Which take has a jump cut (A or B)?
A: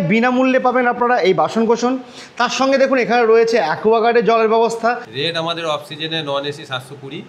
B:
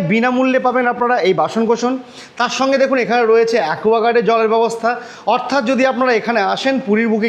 A